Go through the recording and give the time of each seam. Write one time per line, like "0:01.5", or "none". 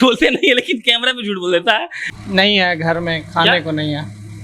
0:02.0